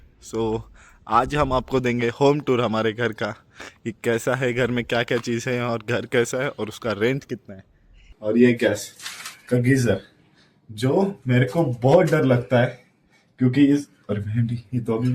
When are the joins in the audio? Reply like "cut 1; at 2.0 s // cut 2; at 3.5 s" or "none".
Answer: cut 1; at 8.1 s